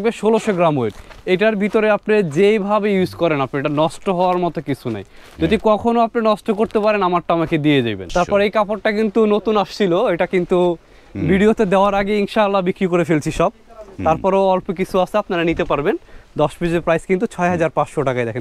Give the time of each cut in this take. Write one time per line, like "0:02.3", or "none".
0:08.1